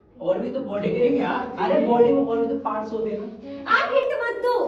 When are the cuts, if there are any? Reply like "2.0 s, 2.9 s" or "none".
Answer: none